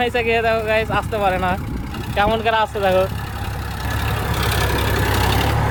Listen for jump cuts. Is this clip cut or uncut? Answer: uncut